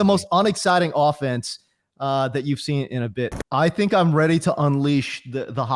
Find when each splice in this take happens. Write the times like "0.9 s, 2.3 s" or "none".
3.4 s